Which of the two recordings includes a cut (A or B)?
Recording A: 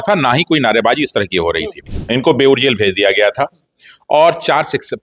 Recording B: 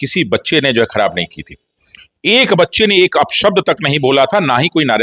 A